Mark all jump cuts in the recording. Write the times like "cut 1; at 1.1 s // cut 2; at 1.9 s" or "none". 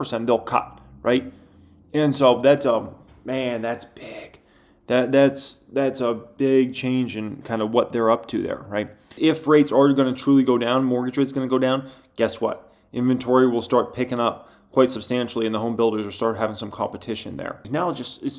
cut 1; at 9.1 s // cut 2; at 17.6 s